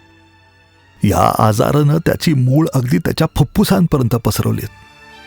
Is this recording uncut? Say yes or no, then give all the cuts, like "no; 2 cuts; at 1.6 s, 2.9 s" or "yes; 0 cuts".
no; 1 cut; at 0.9 s